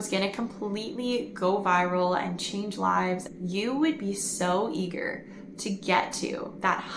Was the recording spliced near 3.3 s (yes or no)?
yes